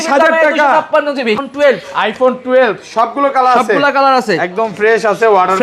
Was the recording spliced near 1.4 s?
yes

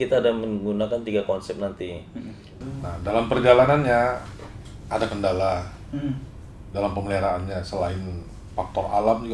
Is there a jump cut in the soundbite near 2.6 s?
yes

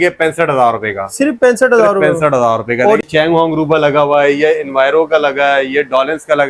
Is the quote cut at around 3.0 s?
yes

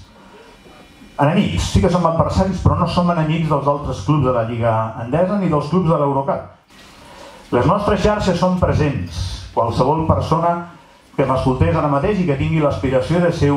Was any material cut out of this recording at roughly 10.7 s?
no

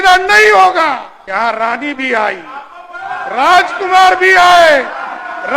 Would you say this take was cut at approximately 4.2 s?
no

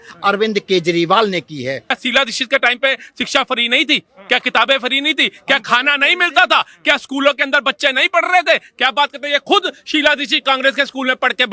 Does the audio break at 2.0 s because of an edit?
yes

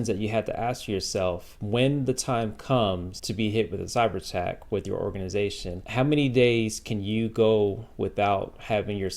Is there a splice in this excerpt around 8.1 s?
no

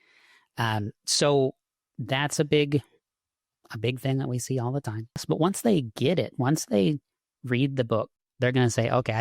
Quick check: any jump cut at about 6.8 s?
no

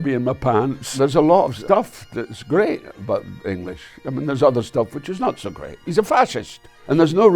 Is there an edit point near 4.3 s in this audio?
no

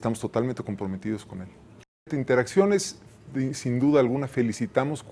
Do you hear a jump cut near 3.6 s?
no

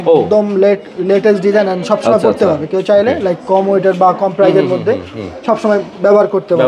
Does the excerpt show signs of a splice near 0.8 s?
no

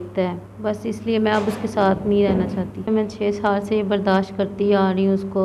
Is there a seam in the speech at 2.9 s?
yes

